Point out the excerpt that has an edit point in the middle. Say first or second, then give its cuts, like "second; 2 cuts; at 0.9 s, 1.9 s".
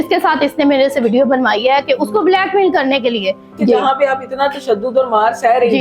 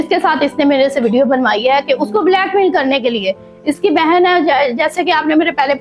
first; 1 cut; at 3.6 s